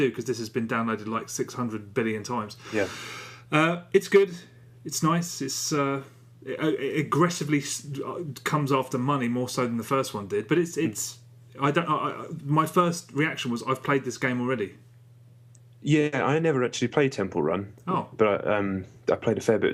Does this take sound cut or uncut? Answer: uncut